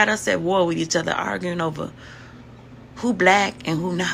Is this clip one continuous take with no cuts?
yes; 0 cuts

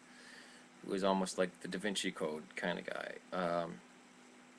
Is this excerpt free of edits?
no; 1 cut; at 2.1 s

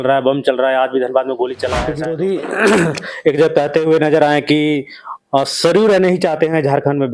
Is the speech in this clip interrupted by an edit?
yes; 1 cut; at 1.9 s

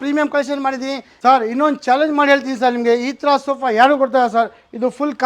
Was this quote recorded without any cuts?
no; 1 cut; at 1.1 s

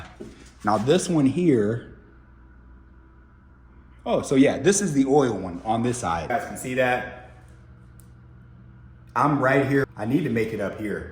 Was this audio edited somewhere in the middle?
yes; 2 cuts; at 6.3 s, 9.9 s

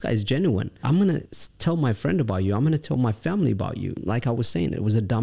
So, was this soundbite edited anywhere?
yes; 2 cuts; at 1.2 s, 4.0 s

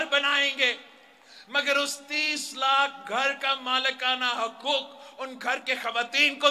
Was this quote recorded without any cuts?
yes; 0 cuts

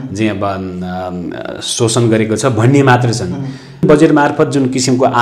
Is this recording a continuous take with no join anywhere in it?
no; 1 cut; at 3.8 s

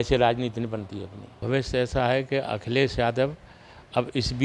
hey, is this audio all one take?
no; 1 cut; at 1.4 s

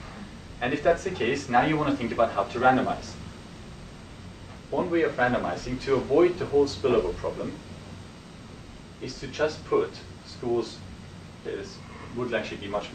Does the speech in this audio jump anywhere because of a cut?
no; 0 cuts

